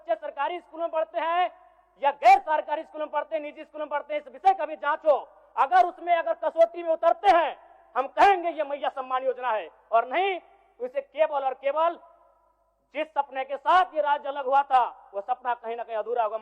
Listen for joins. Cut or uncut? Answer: uncut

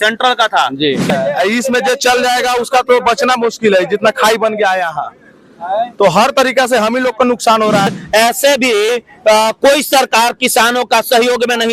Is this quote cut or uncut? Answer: cut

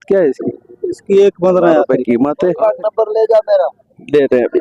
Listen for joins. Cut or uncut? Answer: cut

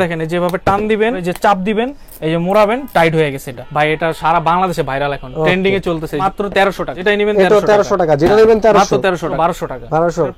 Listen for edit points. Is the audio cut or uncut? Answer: cut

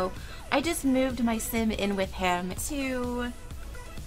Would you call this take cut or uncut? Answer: uncut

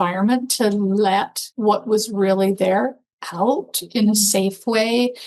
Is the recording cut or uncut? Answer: cut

